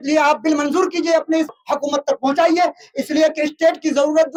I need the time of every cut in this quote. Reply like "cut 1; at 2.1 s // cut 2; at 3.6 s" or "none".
none